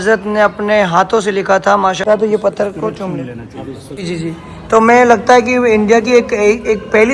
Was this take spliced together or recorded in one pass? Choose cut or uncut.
cut